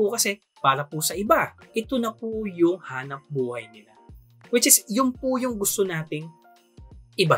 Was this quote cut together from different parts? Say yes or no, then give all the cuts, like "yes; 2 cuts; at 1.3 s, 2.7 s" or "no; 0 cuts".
no; 0 cuts